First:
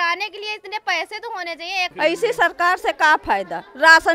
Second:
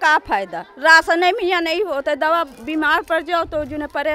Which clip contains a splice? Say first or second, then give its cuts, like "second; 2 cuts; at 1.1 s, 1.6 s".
first; 1 cut; at 1.9 s